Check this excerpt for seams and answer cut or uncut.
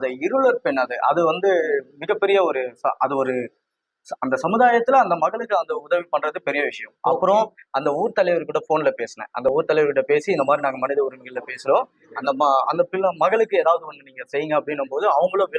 uncut